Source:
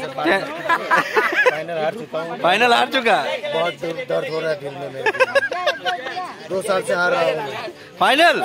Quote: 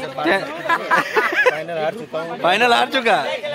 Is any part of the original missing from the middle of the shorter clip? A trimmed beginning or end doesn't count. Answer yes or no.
no